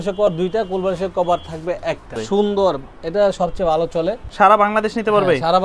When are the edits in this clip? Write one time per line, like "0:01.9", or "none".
0:02.2
0:04.2